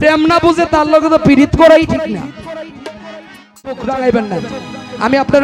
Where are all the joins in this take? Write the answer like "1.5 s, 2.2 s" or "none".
3.8 s